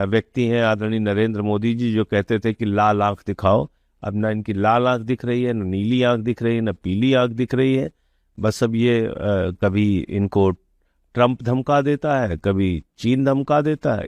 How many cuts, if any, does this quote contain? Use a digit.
0